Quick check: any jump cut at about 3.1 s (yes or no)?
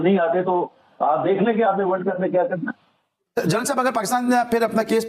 yes